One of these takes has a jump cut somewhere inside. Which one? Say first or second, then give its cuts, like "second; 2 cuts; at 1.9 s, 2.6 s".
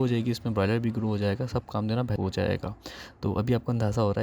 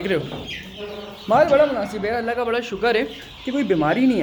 first; 1 cut; at 2.1 s